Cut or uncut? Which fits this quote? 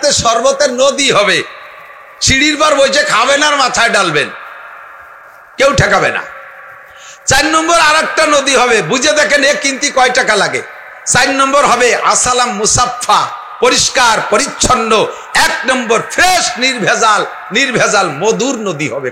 uncut